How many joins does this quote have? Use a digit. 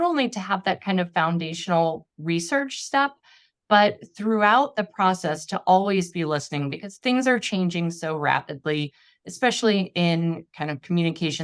0